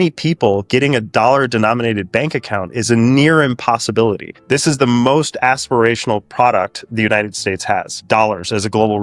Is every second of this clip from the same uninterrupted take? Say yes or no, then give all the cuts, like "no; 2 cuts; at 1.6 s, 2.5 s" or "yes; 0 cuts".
no; 1 cut; at 8.0 s